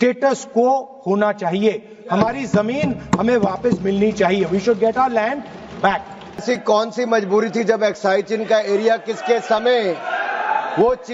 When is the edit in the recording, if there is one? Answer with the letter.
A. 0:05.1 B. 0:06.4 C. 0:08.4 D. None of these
B